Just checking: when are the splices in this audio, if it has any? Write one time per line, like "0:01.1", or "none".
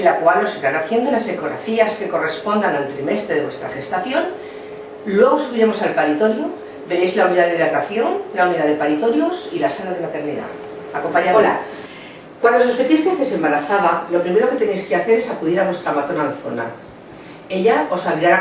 0:14.3